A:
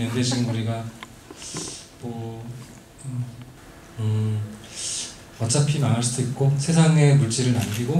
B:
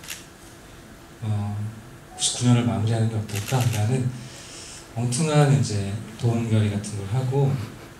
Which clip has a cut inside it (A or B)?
A